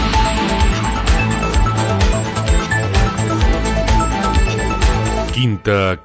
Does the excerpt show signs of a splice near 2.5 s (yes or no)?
yes